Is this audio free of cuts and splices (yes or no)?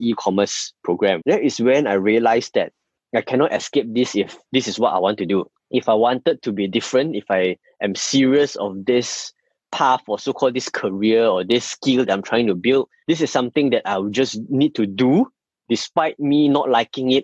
yes